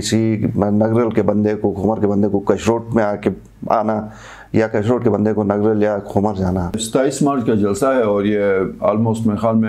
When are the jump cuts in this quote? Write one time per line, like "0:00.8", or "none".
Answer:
0:06.8